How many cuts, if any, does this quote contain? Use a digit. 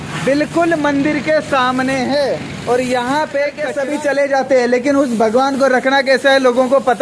1